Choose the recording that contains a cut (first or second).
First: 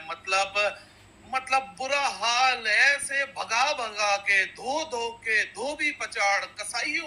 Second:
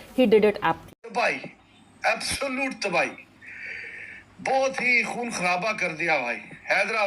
second